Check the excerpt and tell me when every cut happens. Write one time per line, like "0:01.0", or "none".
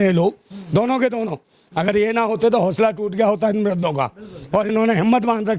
none